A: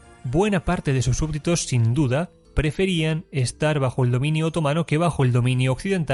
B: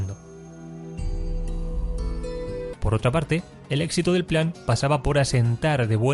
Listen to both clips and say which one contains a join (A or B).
B